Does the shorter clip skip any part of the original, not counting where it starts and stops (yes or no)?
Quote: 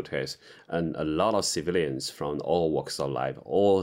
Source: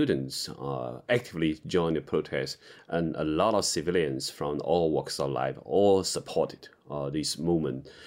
no